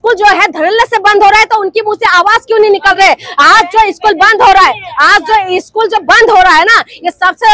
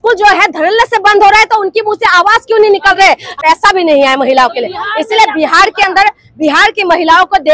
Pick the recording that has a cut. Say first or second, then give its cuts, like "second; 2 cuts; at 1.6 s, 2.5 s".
second; 1 cut; at 3.3 s